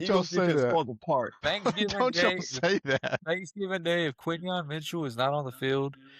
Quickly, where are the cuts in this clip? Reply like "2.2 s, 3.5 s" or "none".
1.4 s